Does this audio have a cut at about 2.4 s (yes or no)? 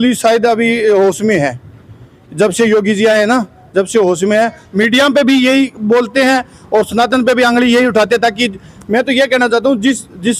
no